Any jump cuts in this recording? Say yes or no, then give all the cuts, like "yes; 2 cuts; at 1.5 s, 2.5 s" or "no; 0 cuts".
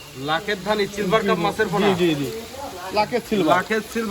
no; 0 cuts